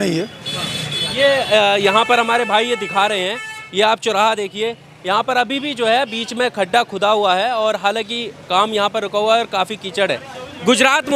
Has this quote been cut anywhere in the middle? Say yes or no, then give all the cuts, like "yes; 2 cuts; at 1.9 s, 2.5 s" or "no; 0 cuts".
no; 0 cuts